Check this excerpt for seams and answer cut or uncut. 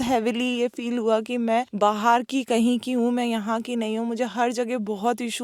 uncut